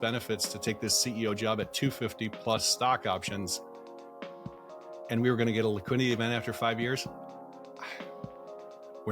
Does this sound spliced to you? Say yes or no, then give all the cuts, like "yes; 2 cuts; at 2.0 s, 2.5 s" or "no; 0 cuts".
no; 0 cuts